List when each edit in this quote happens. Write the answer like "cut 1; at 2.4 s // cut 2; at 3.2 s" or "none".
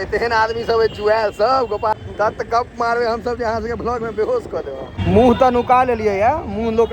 cut 1; at 1.9 s // cut 2; at 4.9 s